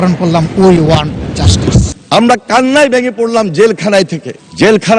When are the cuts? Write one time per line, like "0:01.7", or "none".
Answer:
0:01.9